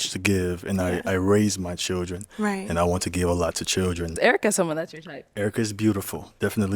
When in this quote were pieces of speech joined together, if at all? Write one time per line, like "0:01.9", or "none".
0:04.2